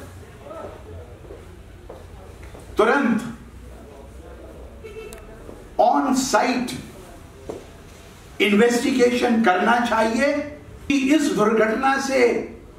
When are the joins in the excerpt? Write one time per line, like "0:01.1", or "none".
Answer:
0:10.9